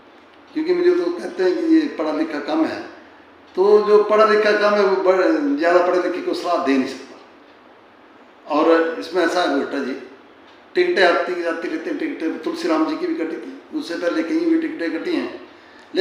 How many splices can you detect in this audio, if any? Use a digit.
0